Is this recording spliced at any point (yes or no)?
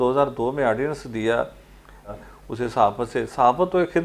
yes